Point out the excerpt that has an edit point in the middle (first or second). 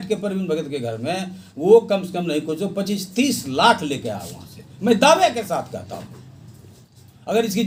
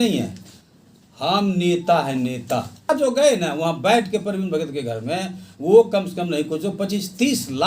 second